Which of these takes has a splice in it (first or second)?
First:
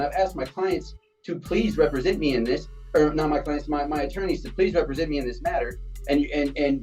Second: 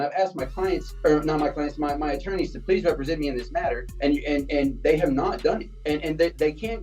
second